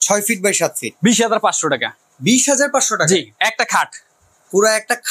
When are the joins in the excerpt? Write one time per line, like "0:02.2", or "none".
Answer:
none